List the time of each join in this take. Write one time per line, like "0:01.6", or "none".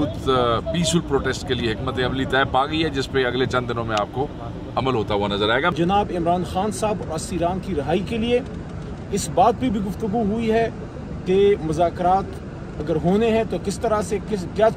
0:05.7